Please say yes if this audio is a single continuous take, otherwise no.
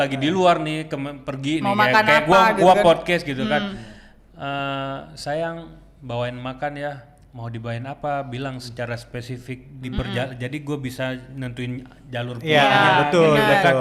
yes